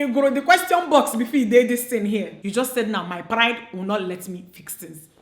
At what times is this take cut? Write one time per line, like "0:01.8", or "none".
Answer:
0:02.4

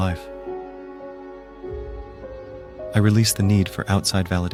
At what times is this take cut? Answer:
none

